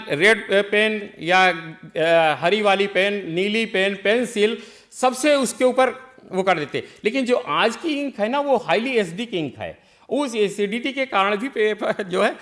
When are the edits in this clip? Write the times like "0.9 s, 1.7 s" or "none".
none